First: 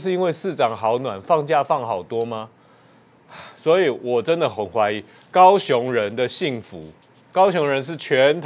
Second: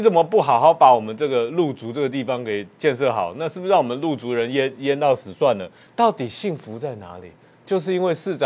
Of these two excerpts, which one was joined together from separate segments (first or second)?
second